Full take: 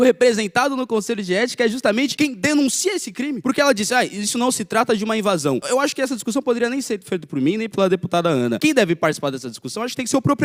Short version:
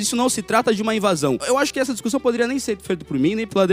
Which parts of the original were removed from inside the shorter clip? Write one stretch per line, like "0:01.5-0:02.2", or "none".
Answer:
none